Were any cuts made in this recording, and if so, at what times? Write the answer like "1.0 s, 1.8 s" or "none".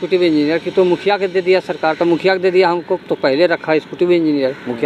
none